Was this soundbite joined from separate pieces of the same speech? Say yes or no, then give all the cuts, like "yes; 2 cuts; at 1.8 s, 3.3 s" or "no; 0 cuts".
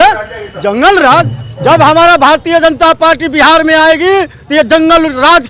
no; 0 cuts